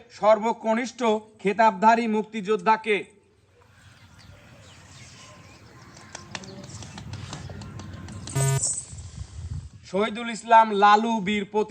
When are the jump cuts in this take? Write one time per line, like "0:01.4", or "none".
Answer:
none